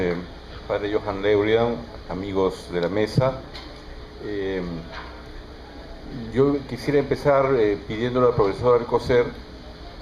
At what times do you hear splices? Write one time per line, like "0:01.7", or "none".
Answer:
none